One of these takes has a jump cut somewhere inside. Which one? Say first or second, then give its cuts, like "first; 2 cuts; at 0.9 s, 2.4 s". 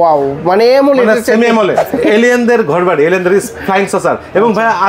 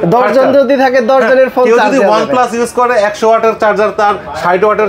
first; 1 cut; at 1.8 s